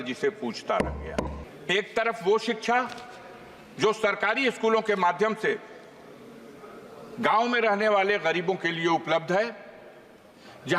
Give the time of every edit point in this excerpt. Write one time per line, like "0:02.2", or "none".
0:01.4